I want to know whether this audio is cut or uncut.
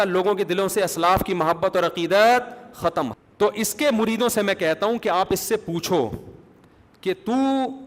cut